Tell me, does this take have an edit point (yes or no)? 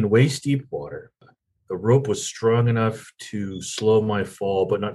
no